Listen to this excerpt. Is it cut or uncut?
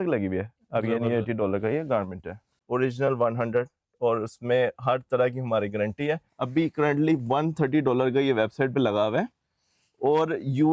cut